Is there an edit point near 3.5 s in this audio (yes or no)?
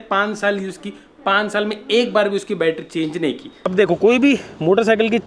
yes